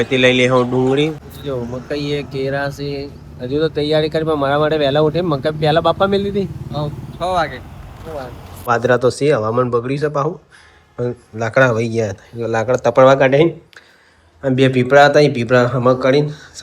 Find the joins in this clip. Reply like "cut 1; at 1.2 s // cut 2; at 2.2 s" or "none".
cut 1; at 1.2 s // cut 2; at 8.7 s

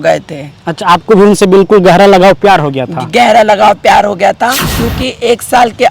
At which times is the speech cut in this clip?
cut 1; at 4.7 s

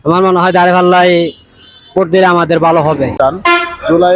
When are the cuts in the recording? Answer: cut 1; at 3.1 s

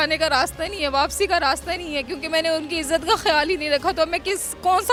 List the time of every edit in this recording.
none

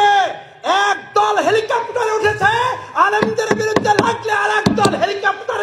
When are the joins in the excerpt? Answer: none

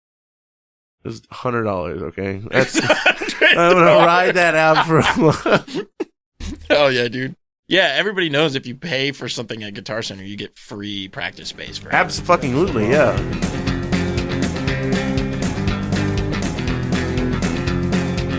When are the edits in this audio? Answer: cut 1; at 13.2 s

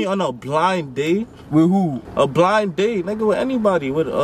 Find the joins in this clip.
none

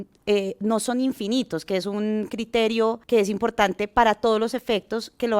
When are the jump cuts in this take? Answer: cut 1; at 3.0 s

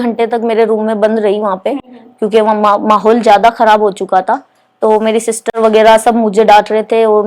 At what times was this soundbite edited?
none

